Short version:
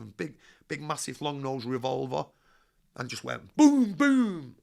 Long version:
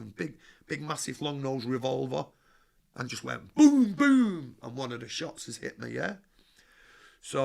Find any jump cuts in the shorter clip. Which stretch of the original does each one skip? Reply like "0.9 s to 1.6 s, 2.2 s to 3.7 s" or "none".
none